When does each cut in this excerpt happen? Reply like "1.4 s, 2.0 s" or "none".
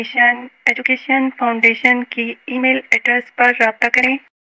none